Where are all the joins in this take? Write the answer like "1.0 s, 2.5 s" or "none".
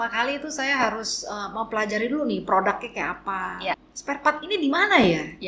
3.9 s